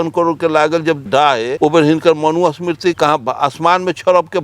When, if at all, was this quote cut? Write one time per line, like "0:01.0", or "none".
0:01.0
0:03.0